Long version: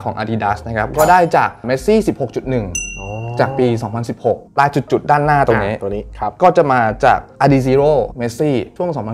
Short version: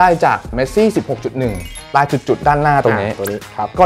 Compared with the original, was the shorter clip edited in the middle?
yes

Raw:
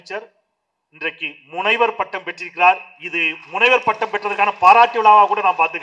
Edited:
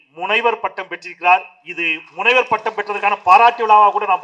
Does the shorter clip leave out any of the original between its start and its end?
no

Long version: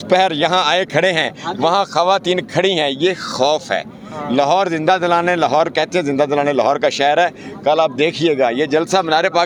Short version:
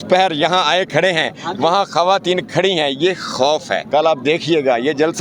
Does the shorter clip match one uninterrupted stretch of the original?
no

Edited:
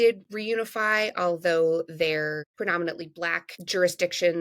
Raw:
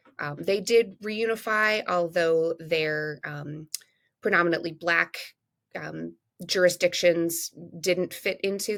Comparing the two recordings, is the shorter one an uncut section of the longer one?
no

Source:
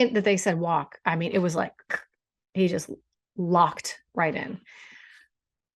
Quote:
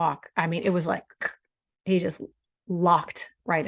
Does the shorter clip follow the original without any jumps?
yes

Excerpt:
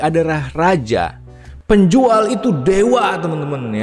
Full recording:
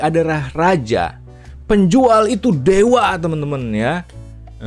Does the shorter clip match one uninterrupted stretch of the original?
yes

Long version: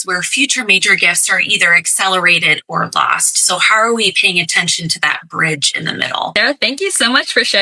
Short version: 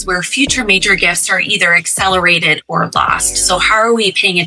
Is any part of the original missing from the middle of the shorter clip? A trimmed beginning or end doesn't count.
no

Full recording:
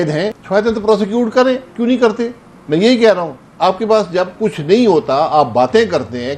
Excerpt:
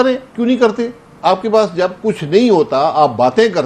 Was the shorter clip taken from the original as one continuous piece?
no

